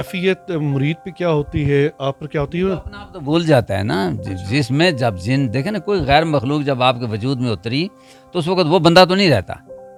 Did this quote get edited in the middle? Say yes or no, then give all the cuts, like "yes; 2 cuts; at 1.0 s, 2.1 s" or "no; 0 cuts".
no; 0 cuts